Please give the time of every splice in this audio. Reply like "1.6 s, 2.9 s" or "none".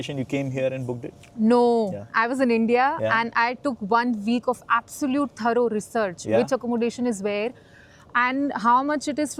none